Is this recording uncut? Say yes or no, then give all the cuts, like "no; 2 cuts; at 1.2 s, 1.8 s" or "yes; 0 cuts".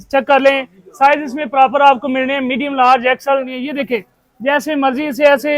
no; 1 cut; at 3.6 s